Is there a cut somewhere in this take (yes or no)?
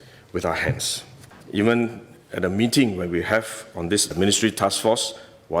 yes